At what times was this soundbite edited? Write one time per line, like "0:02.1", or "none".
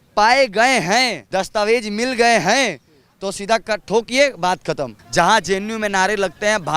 0:01.2
0:04.9

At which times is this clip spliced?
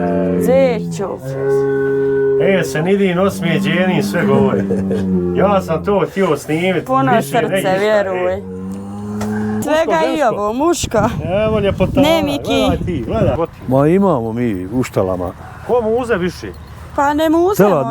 0:09.6
0:13.4

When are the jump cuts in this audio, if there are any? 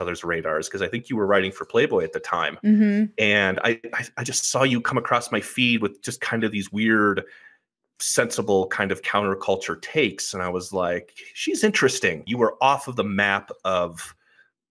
0:12.3

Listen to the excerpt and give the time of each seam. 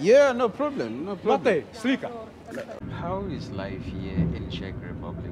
0:02.8

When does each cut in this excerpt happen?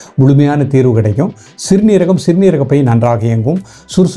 none

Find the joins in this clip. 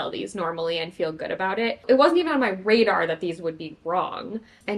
0:01.8

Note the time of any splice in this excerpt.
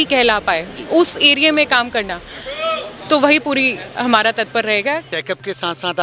0:05.1

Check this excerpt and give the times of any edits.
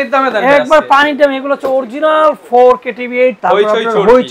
0:03.4

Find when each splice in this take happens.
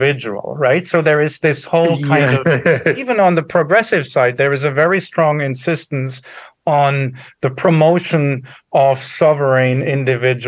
0:03.0

